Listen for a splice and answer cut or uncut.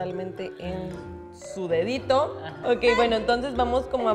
cut